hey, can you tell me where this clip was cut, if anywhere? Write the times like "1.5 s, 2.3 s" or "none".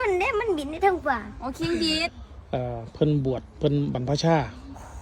1.8 s